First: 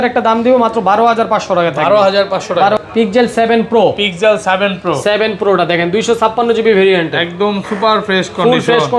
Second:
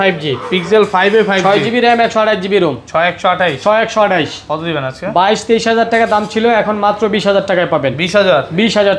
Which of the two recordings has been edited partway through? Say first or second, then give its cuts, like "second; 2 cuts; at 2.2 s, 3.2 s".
first; 1 cut; at 2.8 s